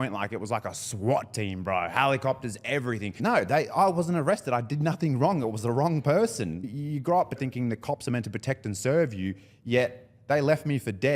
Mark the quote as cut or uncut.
cut